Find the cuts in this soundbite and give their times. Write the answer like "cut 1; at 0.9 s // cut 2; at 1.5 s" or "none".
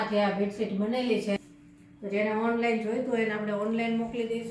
cut 1; at 1.4 s

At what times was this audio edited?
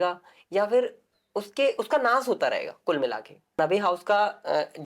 cut 1; at 3.6 s

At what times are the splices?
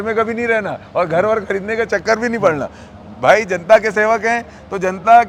none

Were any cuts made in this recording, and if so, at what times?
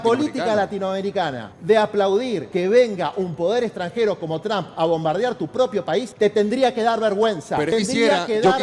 cut 1; at 1.5 s // cut 2; at 2.4 s // cut 3; at 6.1 s // cut 4; at 7.7 s

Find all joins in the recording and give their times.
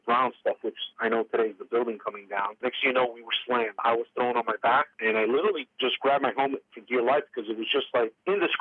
cut 1; at 2.6 s // cut 2; at 3.8 s // cut 3; at 4.9 s

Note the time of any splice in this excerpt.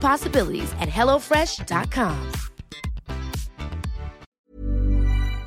cut 1; at 4.2 s

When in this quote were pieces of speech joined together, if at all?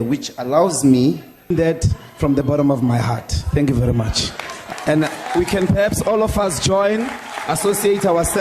cut 1; at 1.5 s

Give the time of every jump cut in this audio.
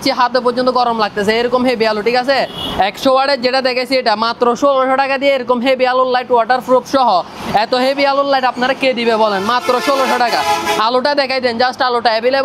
none

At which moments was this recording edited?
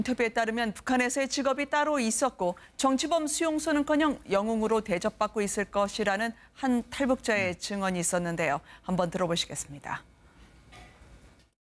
none

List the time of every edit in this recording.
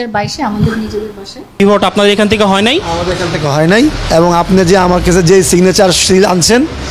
cut 1; at 1.6 s

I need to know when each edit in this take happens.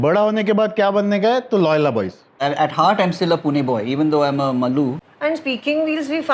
cut 1; at 2.4 s // cut 2; at 5.0 s

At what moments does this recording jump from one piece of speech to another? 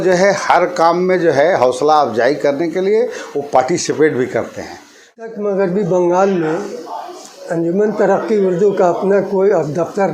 cut 1; at 5.1 s

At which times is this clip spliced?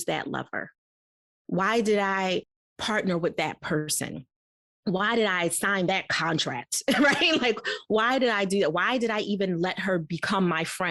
none

